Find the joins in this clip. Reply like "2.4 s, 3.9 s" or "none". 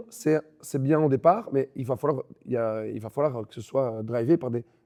none